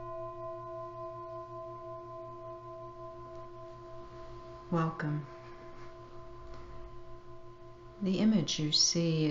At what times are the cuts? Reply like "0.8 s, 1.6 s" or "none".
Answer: 1.1 s